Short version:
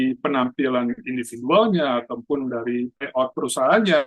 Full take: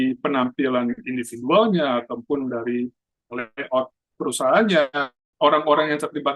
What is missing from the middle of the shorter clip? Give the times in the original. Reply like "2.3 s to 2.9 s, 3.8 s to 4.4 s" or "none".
3.2 s to 4.0 s